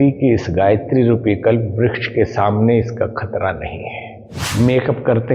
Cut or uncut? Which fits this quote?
cut